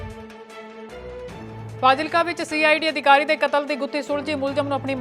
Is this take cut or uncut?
cut